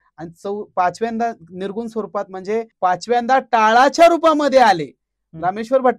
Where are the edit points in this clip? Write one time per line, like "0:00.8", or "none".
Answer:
0:02.7